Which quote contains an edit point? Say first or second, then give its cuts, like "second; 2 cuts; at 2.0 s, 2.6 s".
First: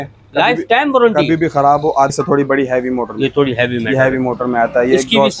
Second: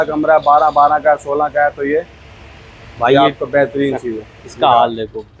first; 1 cut; at 2.1 s